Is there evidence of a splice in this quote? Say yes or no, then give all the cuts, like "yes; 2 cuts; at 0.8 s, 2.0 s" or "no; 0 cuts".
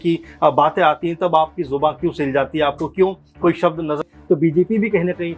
yes; 1 cut; at 4.1 s